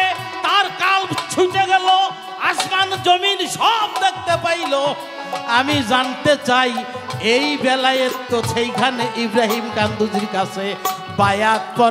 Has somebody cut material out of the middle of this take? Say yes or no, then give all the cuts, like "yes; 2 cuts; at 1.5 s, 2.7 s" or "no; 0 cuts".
no; 0 cuts